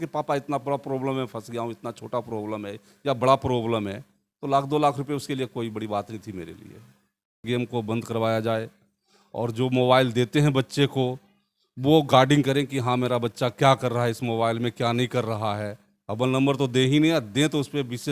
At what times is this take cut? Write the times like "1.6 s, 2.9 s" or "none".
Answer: 7.4 s